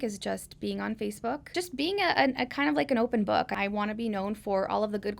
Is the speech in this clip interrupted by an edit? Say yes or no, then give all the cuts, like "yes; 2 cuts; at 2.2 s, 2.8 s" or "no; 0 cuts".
yes; 2 cuts; at 1.4 s, 3.5 s